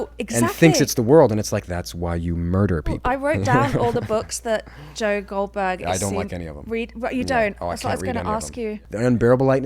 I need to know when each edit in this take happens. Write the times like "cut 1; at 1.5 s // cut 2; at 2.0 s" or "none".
cut 1; at 3.0 s // cut 2; at 8.8 s

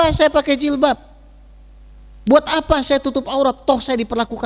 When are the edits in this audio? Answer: none

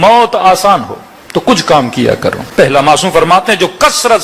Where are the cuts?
cut 1; at 2.4 s

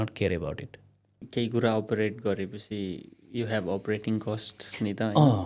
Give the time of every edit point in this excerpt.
cut 1; at 1.2 s

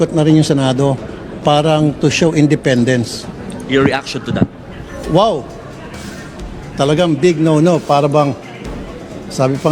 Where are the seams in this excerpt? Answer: none

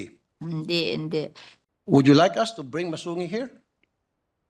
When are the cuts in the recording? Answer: cut 1; at 1.5 s

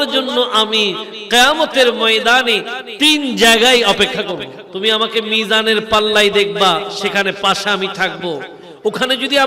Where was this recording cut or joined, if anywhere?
cut 1; at 4.6 s

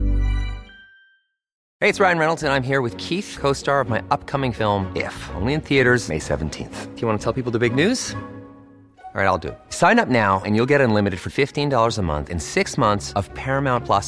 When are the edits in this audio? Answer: cut 1; at 1.6 s

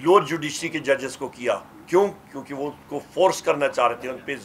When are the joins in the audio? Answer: none

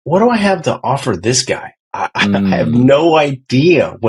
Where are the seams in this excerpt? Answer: none

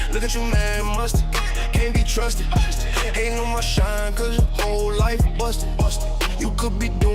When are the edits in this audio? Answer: none

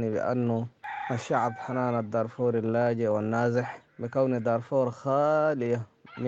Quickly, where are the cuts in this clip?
none

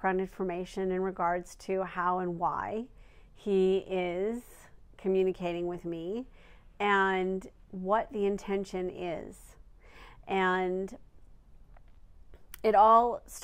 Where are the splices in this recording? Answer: cut 1; at 4.1 s

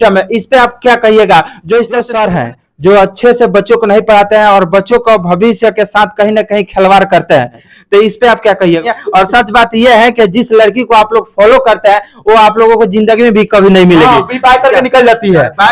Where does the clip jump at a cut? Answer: cut 1; at 2.1 s // cut 2; at 7.6 s // cut 3; at 8.8 s

